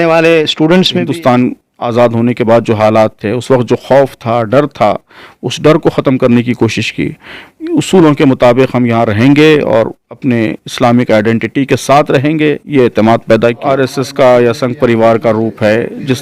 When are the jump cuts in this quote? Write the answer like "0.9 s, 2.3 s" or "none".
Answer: 1.0 s, 13.6 s